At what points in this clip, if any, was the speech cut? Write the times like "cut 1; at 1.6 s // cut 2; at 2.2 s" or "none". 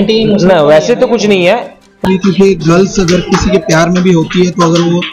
cut 1; at 2.0 s